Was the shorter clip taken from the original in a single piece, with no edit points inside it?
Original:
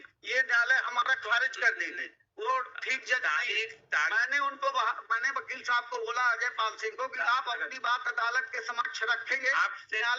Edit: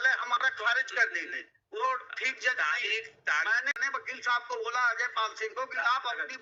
no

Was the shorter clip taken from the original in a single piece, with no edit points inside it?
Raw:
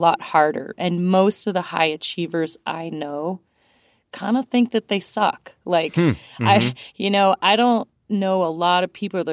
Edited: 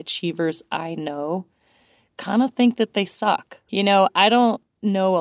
no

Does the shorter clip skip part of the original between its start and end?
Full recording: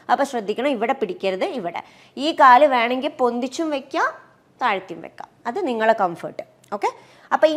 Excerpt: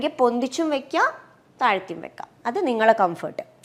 no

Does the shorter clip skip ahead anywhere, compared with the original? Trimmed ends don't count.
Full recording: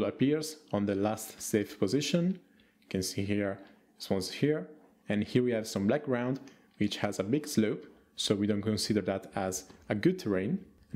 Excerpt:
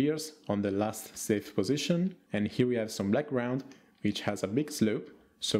yes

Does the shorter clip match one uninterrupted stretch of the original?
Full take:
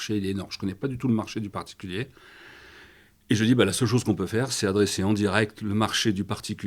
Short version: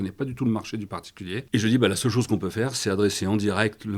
no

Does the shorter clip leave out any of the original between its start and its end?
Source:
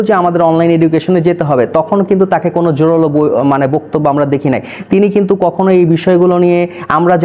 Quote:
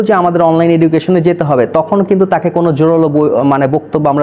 no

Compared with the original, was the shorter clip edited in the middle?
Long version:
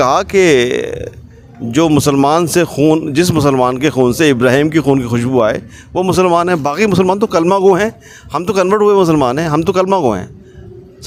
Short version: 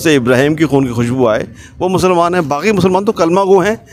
no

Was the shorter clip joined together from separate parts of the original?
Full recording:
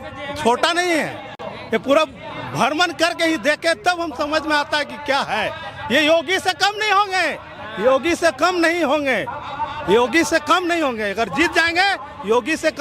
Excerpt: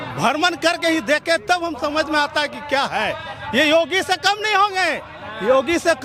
no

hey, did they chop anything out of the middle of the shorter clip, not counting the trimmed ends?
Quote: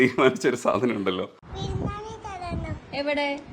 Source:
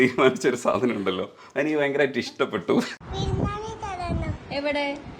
yes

